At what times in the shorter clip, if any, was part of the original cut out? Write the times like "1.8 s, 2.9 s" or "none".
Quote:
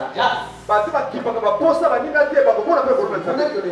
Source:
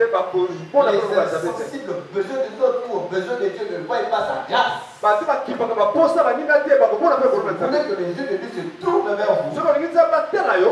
none